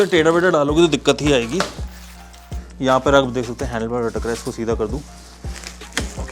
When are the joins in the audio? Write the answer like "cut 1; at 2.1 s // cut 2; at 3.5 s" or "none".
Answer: none